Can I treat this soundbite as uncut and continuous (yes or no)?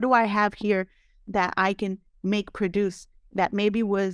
yes